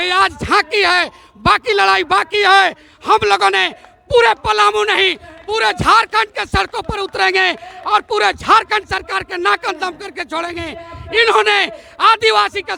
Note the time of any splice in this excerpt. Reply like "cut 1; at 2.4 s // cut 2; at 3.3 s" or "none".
none

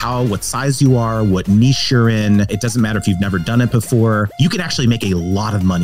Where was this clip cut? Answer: cut 1; at 2.5 s // cut 2; at 4.3 s

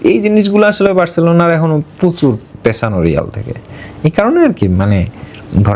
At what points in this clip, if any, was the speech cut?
none

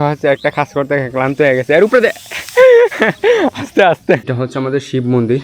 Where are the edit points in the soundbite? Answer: cut 1; at 4.2 s

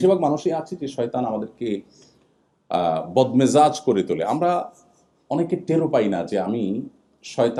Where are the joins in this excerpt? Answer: none

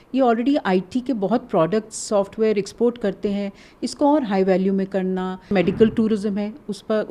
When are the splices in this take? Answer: cut 1; at 5.5 s

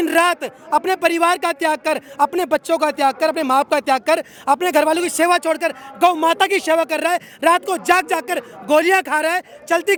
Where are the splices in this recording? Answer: none

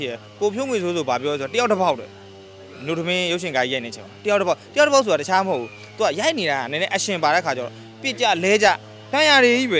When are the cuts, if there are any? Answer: none

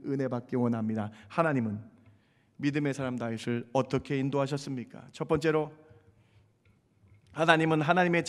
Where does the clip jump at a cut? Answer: none

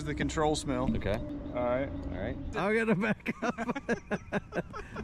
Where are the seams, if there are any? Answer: cut 1; at 1.3 s // cut 2; at 2.5 s

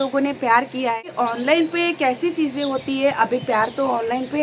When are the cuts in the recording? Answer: cut 1; at 1.1 s

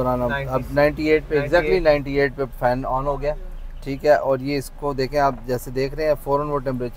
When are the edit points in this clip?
none

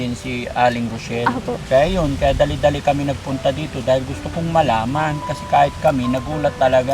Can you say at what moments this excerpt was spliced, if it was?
cut 1; at 1.6 s

